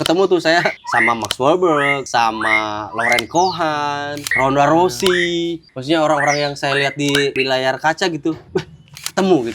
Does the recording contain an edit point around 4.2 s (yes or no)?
yes